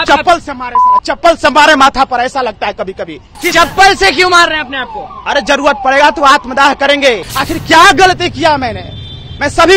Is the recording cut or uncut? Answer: cut